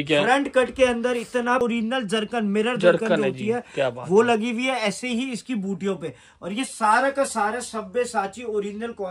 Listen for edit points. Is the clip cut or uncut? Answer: cut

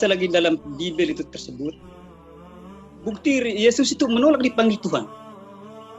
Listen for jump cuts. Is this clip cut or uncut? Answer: cut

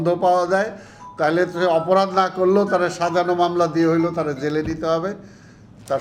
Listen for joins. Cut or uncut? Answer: uncut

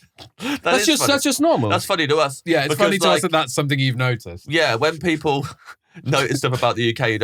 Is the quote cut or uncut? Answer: uncut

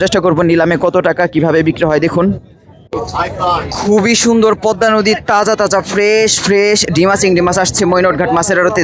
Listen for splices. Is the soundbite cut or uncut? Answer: cut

